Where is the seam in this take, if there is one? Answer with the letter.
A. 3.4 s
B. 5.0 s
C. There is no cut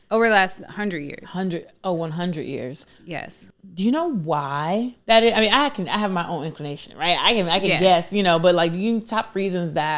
A